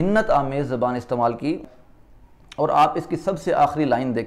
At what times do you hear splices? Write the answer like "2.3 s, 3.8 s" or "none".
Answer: 1.6 s